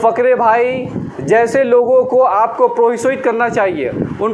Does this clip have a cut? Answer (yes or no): no